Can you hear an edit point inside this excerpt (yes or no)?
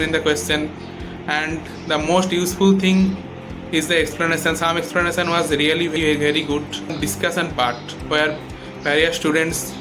yes